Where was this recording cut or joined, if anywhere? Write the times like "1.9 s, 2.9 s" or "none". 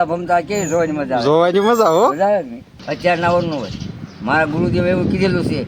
2.8 s